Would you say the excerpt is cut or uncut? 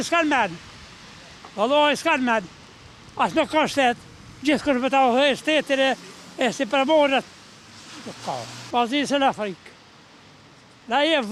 uncut